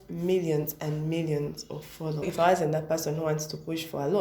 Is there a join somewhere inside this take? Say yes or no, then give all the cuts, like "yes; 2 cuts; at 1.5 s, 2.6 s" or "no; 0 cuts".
no; 0 cuts